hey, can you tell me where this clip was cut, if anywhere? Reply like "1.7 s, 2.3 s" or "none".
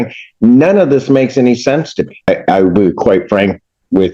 2.3 s